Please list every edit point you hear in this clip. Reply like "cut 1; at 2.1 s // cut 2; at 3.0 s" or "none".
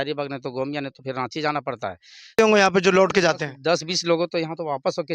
cut 1; at 2.3 s